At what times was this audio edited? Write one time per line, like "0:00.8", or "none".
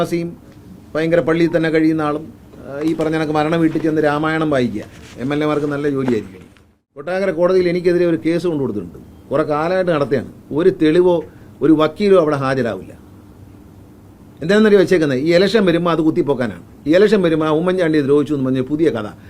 0:07.1

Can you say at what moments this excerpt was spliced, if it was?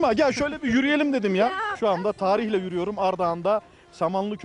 0:01.7

